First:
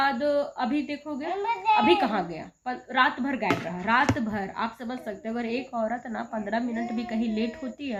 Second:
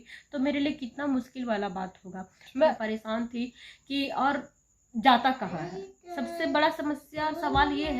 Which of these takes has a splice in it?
second; 1 cut; at 2.8 s

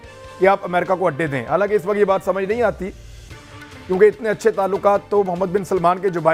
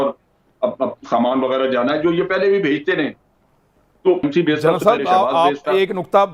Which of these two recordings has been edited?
second; 1 cut; at 4.2 s

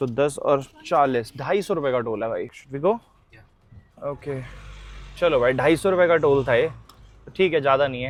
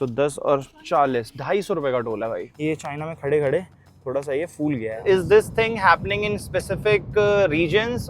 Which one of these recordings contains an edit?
second; 2 cuts; at 2.5 s, 5.0 s

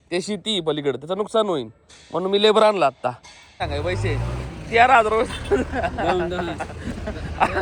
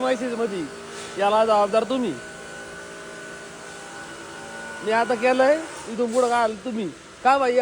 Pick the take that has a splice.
first; 1 cut; at 3.6 s

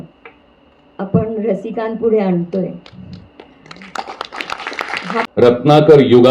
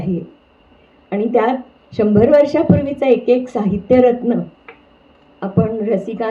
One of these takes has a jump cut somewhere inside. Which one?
first; 1 cut; at 5.3 s

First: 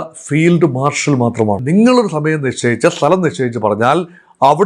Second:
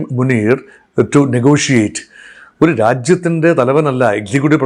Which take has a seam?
first; 1 cut; at 1.6 s

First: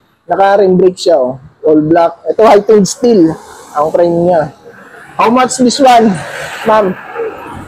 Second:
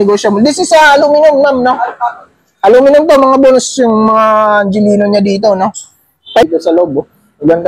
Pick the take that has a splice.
second; 1 cut; at 6.4 s

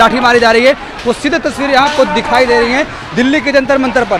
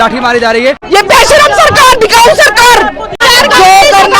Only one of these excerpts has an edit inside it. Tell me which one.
second; 2 cuts; at 0.8 s, 3.2 s

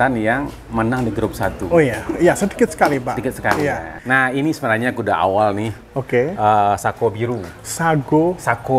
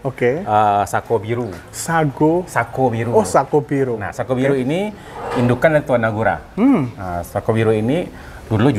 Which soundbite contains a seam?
first; 1 cut; at 3.9 s

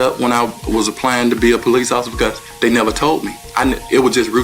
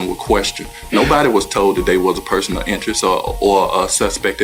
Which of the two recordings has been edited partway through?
first; 1 cut; at 1.6 s

